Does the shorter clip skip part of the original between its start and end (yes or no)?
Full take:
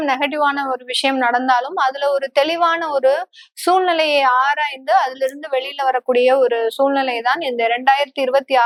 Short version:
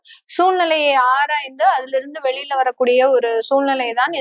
no